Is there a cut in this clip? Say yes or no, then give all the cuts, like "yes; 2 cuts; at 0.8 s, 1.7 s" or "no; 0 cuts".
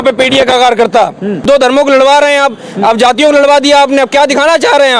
yes; 1 cut; at 1.4 s